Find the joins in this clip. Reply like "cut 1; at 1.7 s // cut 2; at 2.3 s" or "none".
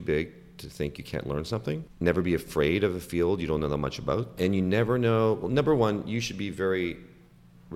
cut 1; at 1.9 s // cut 2; at 4.3 s

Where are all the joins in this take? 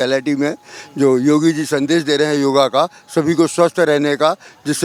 none

